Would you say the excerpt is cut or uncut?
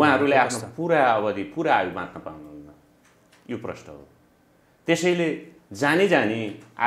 uncut